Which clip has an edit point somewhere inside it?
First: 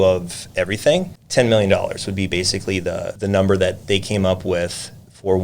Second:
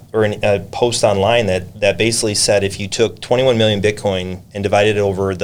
first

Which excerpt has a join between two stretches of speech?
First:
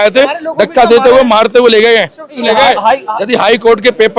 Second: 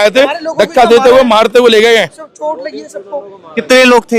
first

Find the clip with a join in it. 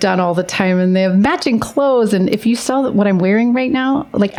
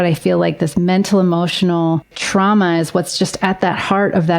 second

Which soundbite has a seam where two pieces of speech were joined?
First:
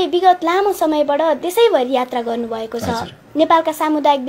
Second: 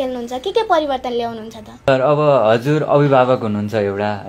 second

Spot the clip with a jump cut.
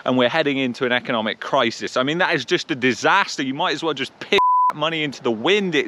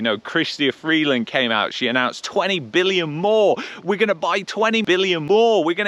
second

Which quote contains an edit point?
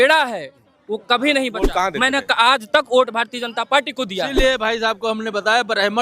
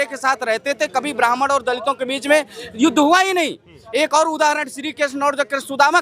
first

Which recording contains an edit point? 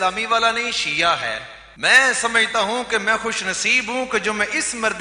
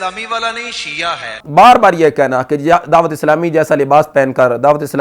second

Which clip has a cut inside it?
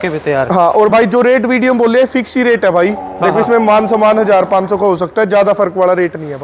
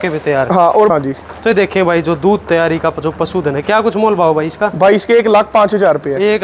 second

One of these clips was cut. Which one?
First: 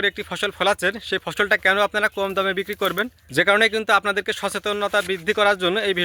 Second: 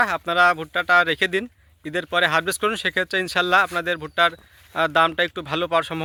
first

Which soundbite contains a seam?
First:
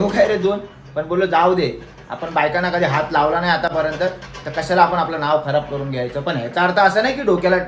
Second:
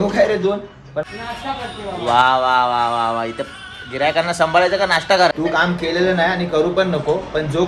second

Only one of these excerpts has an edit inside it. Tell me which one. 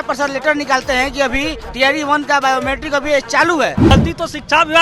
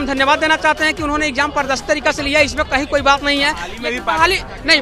first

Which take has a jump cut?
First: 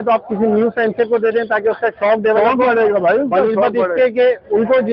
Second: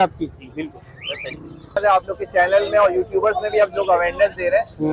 second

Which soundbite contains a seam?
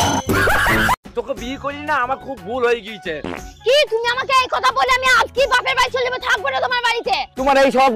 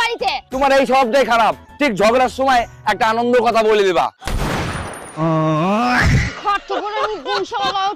first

